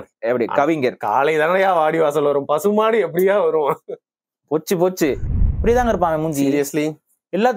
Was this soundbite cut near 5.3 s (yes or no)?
yes